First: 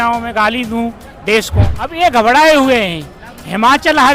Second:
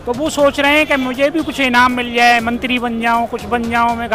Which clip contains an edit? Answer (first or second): first